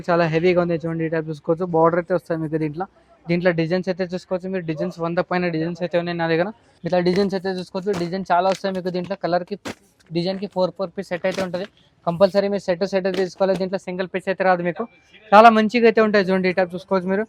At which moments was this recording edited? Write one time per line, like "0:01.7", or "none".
none